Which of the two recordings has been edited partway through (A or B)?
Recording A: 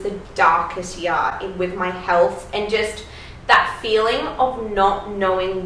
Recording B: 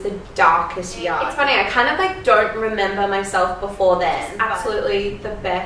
B